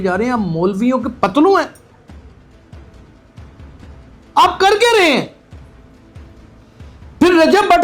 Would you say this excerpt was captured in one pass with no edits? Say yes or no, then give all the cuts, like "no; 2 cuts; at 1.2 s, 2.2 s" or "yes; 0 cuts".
yes; 0 cuts